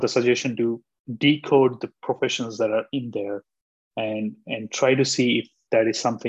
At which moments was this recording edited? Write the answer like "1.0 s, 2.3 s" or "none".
none